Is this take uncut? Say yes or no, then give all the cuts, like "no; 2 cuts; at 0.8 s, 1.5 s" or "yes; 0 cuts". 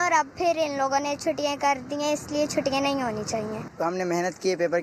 no; 1 cut; at 3.6 s